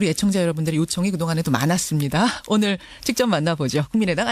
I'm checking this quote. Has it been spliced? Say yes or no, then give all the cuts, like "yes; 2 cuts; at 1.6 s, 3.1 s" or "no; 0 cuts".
no; 0 cuts